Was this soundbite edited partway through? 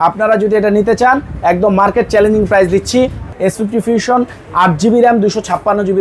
yes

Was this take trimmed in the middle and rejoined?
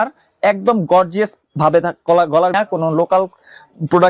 yes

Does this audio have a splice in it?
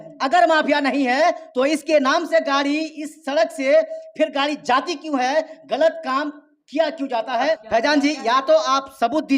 yes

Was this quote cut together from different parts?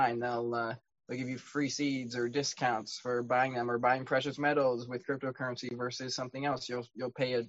no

